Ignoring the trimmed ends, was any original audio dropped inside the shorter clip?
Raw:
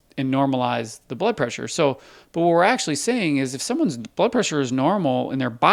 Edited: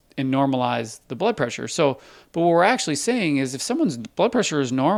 no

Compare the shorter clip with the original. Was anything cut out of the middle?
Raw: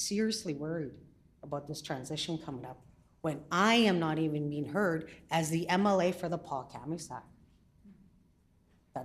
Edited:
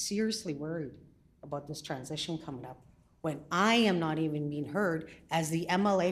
no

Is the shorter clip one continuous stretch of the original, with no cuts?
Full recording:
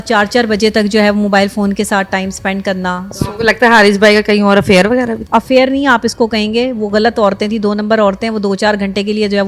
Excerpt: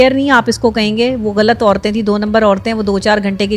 yes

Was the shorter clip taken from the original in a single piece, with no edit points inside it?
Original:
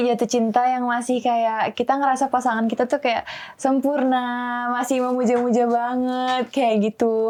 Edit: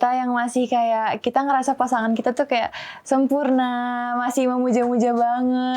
yes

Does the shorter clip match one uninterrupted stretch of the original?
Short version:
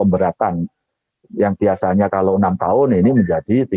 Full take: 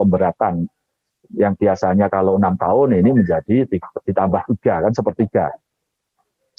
yes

